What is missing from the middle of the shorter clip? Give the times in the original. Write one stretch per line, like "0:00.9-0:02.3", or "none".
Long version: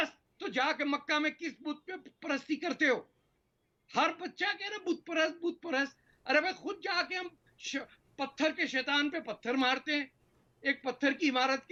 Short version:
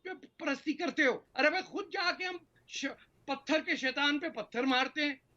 0:03.1-0:06.2